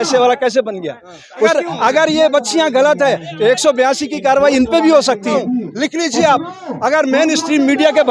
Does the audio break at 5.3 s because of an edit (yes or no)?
yes